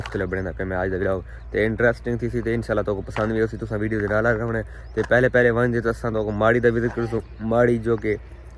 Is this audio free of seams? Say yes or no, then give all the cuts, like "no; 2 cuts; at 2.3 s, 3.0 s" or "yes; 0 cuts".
yes; 0 cuts